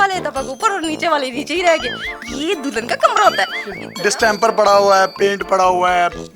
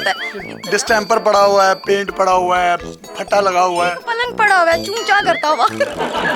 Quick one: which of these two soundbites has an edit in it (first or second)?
first